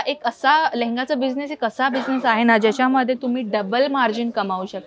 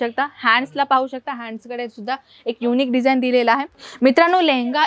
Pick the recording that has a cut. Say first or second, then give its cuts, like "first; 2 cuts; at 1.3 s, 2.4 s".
second; 1 cut; at 3.8 s